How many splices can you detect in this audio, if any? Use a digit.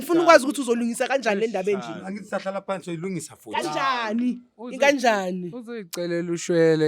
0